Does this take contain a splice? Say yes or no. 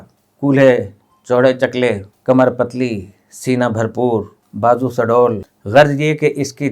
yes